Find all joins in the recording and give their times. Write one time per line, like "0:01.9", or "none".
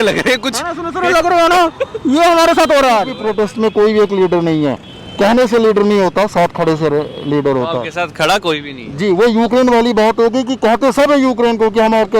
0:03.1

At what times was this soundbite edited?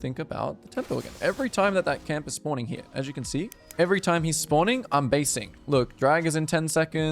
0:03.6

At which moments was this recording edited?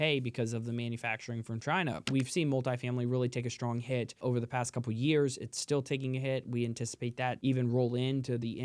0:02.0
0:04.2
0:07.4

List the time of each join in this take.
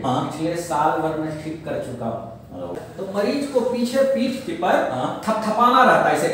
0:02.7

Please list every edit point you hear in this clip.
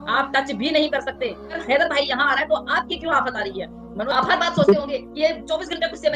0:01.5
0:03.9

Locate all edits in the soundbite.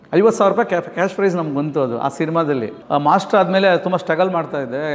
0:02.7

